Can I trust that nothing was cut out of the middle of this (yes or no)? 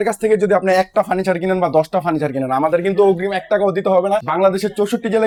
yes